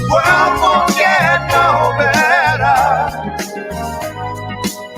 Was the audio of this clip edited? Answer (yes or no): no